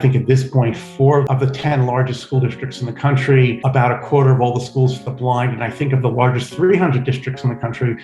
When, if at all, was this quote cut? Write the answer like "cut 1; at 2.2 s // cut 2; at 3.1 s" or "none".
cut 1; at 1.3 s